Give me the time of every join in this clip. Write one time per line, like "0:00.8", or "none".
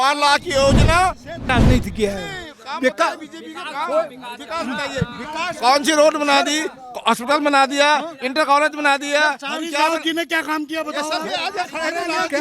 0:01.5